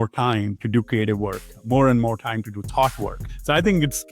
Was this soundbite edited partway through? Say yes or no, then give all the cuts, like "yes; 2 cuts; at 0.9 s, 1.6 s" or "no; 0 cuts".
yes; 1 cut; at 3.2 s